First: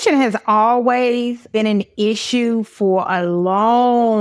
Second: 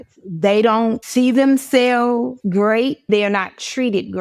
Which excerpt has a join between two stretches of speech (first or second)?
second